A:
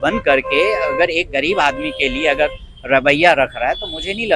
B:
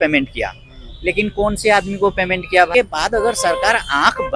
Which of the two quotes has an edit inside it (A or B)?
B